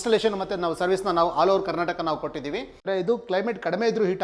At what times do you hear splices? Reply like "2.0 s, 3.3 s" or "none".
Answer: 2.8 s